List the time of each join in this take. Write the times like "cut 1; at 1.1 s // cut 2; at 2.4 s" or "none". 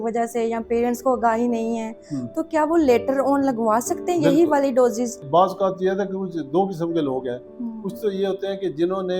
cut 1; at 5.2 s

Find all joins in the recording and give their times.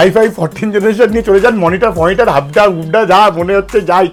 none

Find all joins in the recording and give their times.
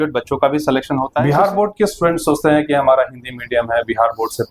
cut 1; at 1.2 s

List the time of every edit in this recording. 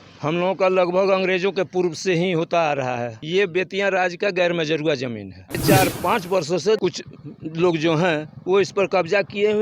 cut 1; at 3.2 s // cut 2; at 5.5 s // cut 3; at 6.8 s

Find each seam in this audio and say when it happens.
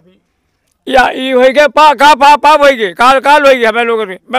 none

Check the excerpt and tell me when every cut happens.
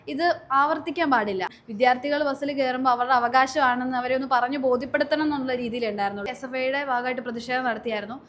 cut 1; at 1.5 s // cut 2; at 6.4 s

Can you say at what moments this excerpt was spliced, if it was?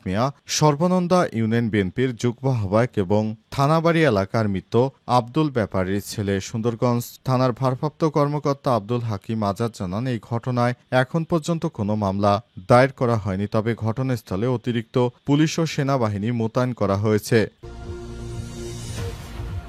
cut 1; at 17.6 s

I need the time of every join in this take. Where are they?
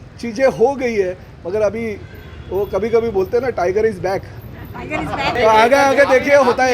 cut 1; at 5.4 s

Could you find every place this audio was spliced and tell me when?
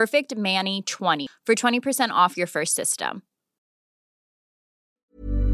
cut 1; at 1.3 s

